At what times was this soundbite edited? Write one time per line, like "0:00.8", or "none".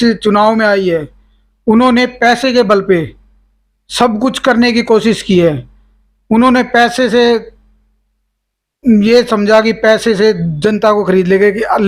none